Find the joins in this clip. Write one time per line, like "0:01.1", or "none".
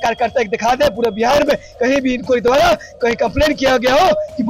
none